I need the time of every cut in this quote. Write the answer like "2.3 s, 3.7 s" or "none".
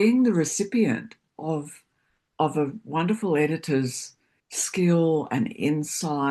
none